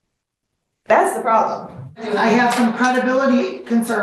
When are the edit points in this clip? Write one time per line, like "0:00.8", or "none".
0:02.1

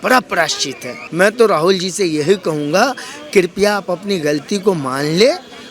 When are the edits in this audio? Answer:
0:01.0

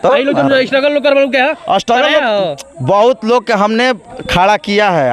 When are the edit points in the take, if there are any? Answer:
none

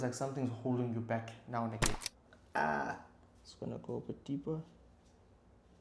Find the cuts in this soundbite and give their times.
0:02.0

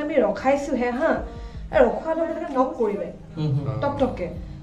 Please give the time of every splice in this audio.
0:02.4

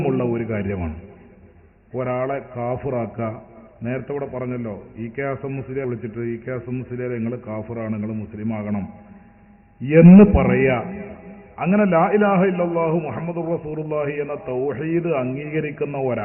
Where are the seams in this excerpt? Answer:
0:05.8

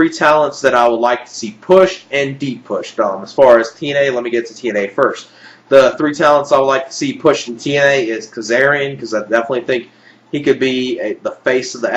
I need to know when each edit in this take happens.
0:07.5

